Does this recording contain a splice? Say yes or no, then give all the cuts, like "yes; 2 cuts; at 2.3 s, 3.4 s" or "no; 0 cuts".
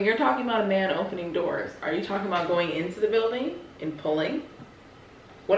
no; 0 cuts